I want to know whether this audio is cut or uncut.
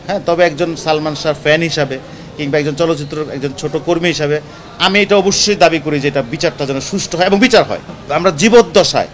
cut